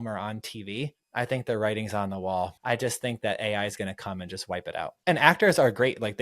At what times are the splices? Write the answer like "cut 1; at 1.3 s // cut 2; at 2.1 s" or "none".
cut 1; at 1.0 s // cut 2; at 2.6 s // cut 3; at 4.9 s